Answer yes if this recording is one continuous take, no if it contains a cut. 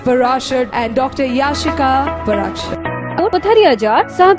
no